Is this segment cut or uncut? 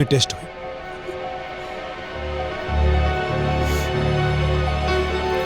uncut